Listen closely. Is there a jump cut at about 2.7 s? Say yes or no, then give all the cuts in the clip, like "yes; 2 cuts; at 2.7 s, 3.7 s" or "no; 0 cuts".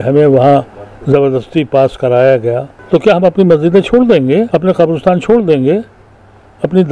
yes; 2 cuts; at 2.7 s, 4.5 s